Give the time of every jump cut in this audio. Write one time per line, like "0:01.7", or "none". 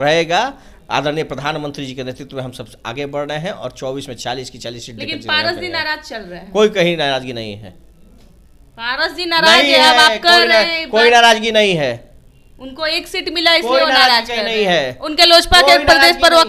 none